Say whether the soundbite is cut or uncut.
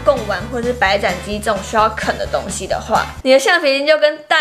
cut